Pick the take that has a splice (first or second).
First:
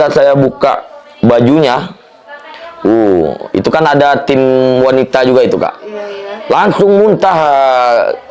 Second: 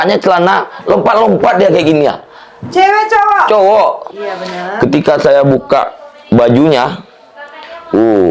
second